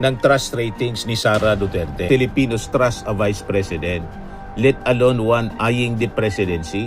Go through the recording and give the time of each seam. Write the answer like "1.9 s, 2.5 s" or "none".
2.1 s